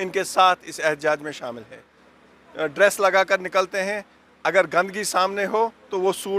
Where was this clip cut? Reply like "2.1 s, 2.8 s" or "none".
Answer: 1.8 s

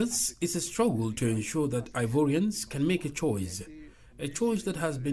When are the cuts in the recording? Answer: none

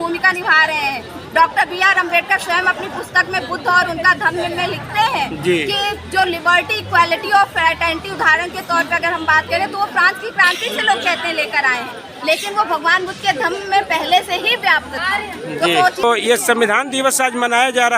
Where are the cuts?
16.0 s

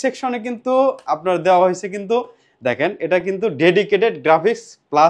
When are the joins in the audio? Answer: none

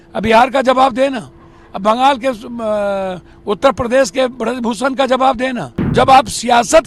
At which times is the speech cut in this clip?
5.9 s

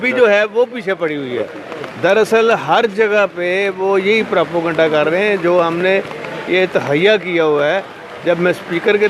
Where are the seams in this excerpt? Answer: none

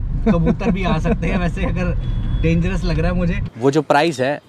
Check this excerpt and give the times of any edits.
3.4 s

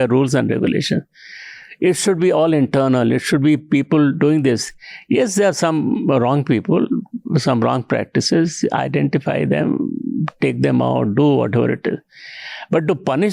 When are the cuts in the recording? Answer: none

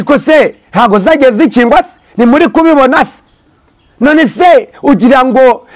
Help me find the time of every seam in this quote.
none

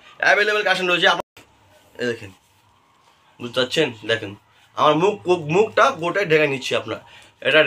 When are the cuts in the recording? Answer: 1.2 s

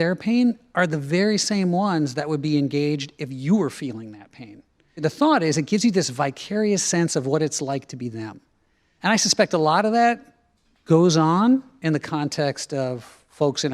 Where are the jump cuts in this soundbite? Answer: 5.0 s, 8.9 s

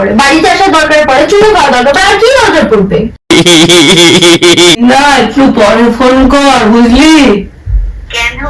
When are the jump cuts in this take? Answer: 4.8 s

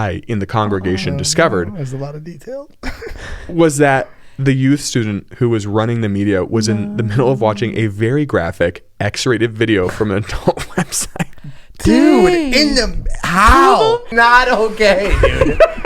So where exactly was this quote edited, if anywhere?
14.1 s

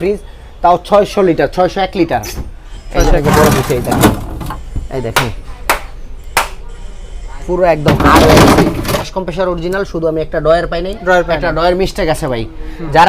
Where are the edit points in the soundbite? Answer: 3.2 s, 9.1 s

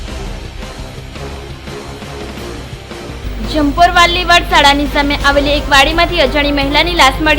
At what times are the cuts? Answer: 3.2 s

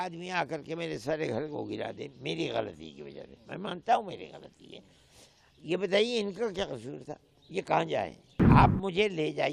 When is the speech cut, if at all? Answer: 8.3 s

